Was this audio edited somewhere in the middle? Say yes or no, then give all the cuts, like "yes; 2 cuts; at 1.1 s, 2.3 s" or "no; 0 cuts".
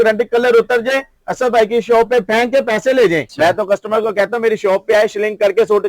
yes; 1 cut; at 3.3 s